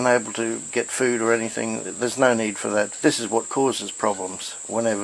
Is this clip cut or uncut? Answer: cut